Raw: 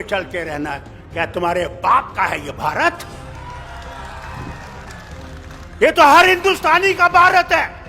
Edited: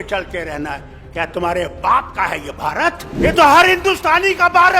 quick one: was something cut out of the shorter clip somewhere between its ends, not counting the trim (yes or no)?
yes